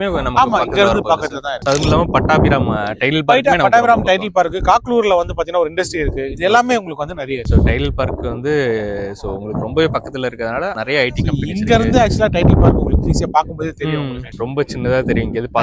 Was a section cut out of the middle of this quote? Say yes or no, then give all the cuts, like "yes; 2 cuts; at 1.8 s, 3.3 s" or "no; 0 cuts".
no; 0 cuts